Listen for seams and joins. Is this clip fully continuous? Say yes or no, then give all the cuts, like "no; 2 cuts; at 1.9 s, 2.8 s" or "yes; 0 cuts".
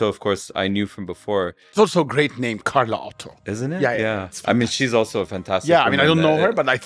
no; 1 cut; at 1.6 s